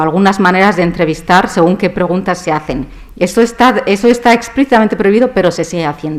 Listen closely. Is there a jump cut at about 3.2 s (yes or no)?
no